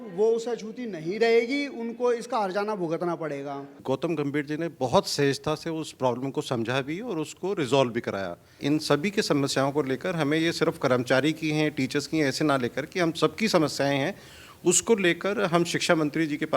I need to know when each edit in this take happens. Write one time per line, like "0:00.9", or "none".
0:03.8
0:08.6